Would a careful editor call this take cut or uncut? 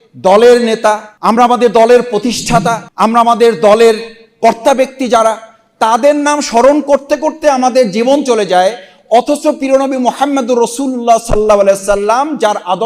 cut